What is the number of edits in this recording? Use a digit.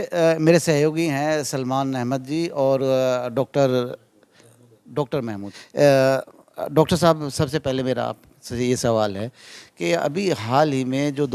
2